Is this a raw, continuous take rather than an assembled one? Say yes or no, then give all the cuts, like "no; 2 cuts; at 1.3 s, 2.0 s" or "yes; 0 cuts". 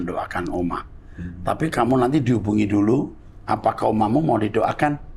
yes; 0 cuts